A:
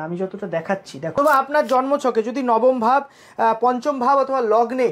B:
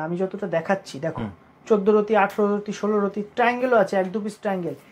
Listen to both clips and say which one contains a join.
A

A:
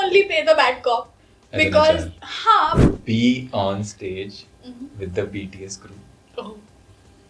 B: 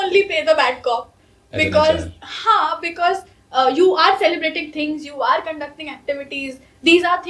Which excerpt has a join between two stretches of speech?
A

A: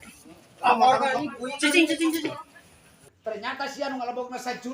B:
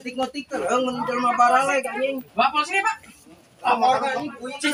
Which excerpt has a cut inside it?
A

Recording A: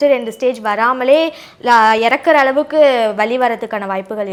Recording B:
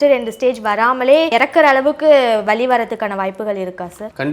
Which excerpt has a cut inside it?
B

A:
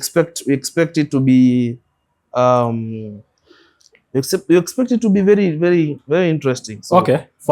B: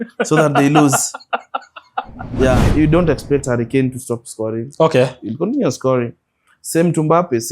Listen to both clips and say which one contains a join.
B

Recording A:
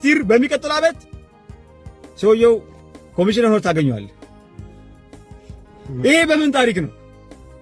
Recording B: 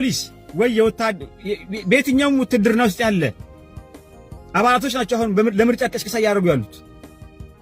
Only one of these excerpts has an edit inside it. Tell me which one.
B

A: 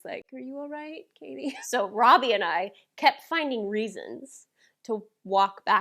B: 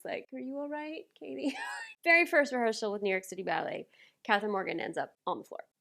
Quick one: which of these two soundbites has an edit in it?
A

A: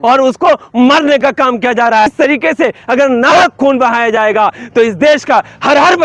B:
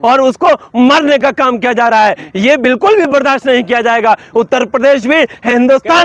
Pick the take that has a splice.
A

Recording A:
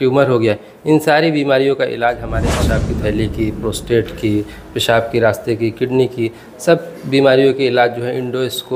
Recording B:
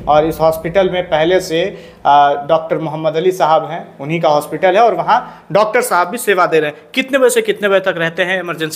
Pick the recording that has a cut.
A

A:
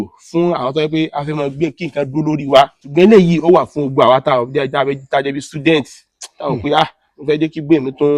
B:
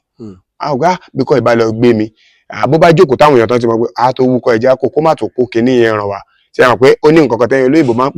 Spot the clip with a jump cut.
A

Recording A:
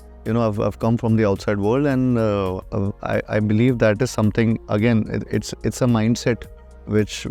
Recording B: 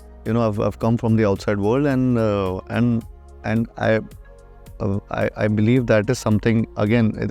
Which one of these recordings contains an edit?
A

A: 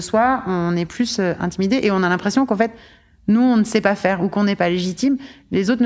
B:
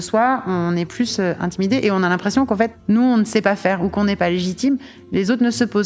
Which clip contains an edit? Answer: B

